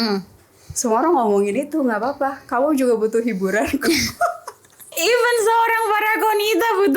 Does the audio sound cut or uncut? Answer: cut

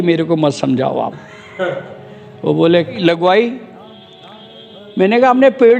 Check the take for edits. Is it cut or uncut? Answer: cut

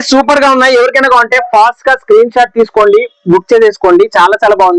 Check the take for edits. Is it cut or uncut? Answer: uncut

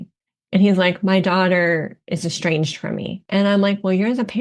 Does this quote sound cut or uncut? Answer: cut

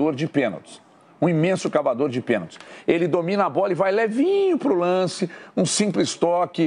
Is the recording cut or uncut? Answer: uncut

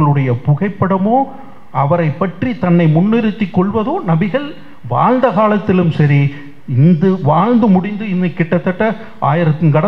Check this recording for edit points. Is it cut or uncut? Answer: uncut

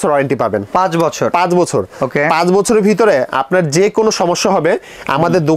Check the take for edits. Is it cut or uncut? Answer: uncut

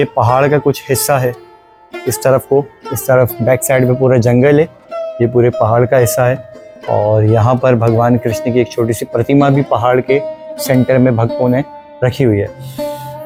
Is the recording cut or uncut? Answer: uncut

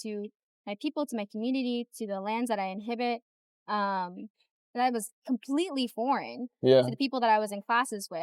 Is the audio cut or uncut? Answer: uncut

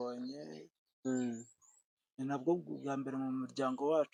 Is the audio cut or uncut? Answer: uncut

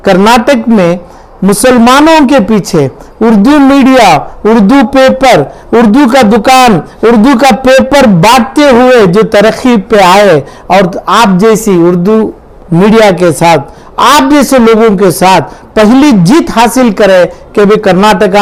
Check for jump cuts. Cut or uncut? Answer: uncut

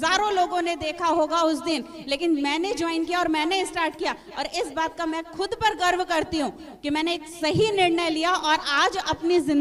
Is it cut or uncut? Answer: uncut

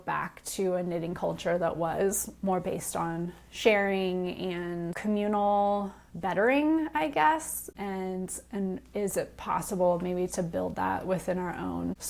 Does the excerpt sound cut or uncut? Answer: uncut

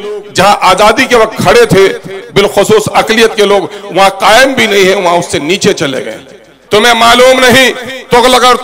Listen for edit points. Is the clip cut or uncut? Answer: cut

